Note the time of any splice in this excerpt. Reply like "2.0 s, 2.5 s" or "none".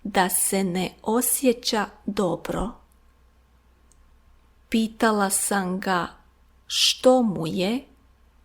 3.5 s